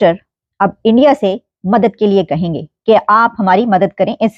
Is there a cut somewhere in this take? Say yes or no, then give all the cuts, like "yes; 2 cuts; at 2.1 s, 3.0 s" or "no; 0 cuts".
no; 0 cuts